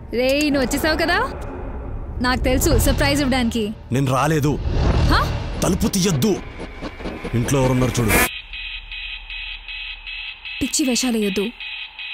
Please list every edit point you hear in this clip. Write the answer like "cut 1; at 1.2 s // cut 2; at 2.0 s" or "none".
cut 1; at 8.3 s